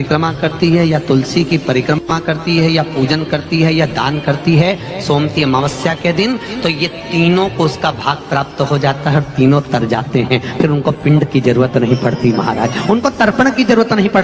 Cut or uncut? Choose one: uncut